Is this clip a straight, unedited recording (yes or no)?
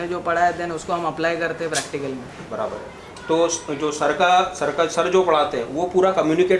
yes